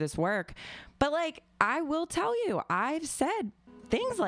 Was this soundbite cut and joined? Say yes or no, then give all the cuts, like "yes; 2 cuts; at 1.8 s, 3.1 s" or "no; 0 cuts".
no; 0 cuts